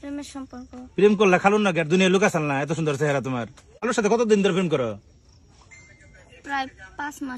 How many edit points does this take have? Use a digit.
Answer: 1